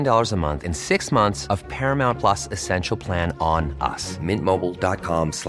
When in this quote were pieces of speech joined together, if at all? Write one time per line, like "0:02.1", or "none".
none

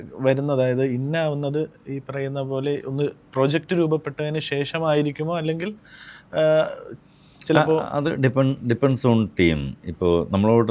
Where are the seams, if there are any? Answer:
none

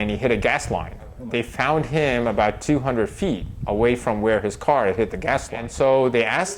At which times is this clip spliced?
0:01.2
0:05.6

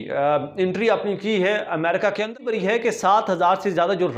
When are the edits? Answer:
0:02.4

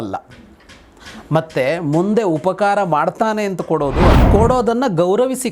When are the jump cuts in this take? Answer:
0:04.2

